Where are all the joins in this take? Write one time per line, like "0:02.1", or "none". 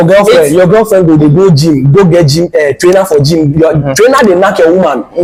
none

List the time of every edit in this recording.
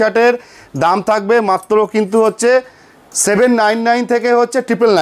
none

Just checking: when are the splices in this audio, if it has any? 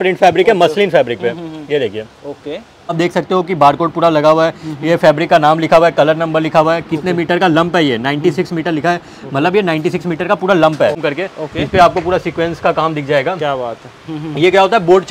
0:02.9
0:11.0

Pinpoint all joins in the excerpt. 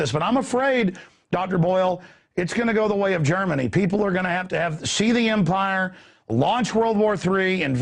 none

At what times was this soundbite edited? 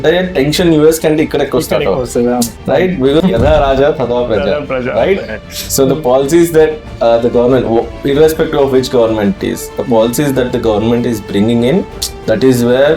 0:03.2

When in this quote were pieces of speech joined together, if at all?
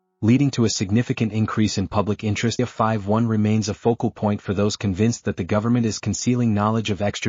0:02.6

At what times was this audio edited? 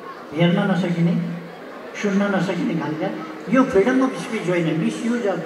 none

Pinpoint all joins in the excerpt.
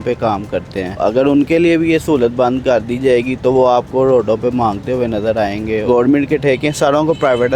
0:01.0
0:05.8

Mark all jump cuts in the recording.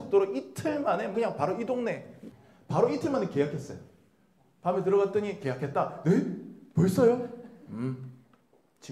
0:01.1
0:02.1

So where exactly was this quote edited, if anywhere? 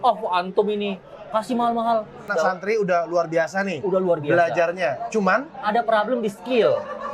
0:02.3

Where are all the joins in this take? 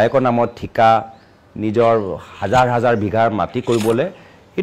none

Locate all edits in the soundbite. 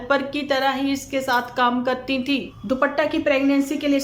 0:02.5

